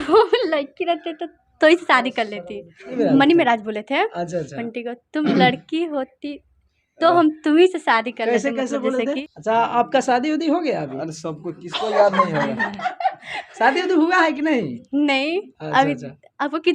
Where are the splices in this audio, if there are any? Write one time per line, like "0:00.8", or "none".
0:02.9
0:09.3